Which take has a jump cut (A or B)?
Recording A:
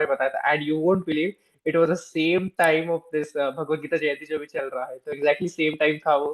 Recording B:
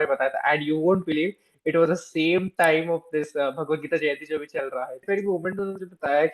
B